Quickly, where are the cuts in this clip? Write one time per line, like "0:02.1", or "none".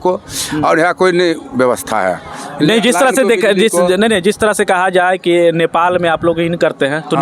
none